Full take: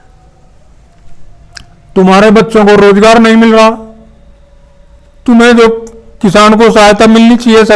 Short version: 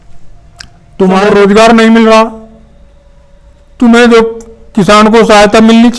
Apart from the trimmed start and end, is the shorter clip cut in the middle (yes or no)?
yes